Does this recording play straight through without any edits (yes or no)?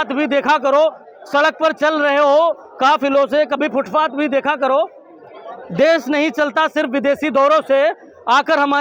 yes